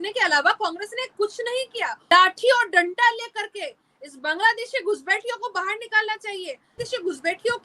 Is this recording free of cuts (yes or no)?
no